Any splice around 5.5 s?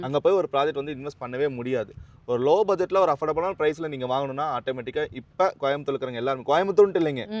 no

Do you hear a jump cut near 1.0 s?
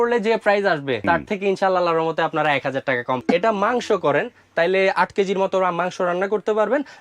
yes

